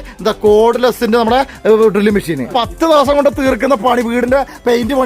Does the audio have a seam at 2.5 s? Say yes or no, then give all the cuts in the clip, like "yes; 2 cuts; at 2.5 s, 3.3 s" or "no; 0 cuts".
yes; 1 cut; at 2.5 s